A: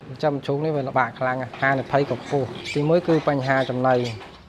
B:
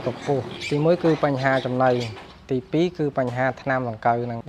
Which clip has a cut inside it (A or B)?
A